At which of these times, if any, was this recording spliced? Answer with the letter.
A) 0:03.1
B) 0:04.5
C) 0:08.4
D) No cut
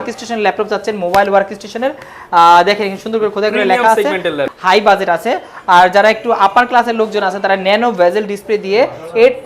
B